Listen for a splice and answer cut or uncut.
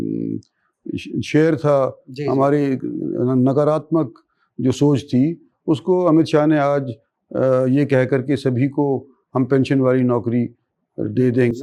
uncut